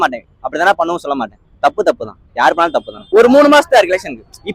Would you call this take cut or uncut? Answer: cut